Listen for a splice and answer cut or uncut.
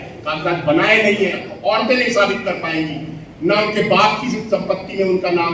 cut